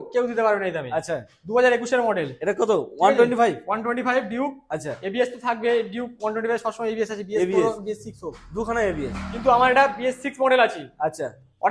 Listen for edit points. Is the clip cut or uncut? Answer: uncut